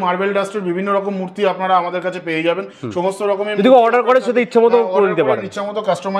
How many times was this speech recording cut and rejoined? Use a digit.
0